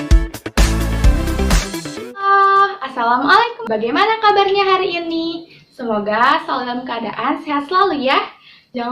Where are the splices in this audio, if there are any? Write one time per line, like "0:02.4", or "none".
0:02.2
0:03.6